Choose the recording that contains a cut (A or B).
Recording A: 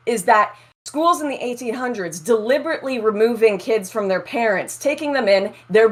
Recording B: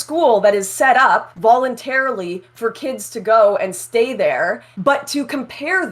B